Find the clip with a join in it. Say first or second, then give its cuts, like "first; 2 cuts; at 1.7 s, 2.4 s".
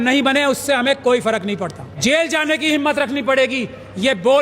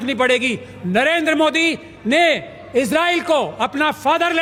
first; 1 cut; at 1.8 s